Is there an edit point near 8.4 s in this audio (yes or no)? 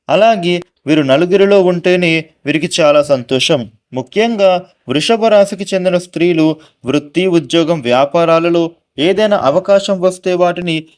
no